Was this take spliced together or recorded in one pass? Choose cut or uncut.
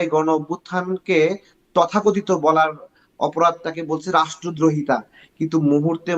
uncut